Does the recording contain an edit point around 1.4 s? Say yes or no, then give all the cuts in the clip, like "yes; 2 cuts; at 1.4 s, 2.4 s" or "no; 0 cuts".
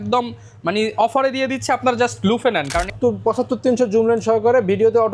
no; 1 cut; at 2.9 s